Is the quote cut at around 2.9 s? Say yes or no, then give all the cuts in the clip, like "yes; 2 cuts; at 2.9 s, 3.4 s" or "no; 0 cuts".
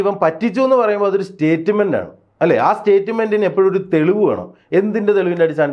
no; 0 cuts